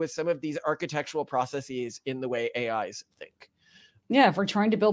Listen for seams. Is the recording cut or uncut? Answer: uncut